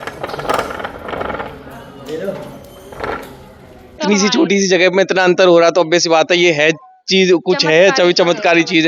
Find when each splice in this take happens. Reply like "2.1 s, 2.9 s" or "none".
4.0 s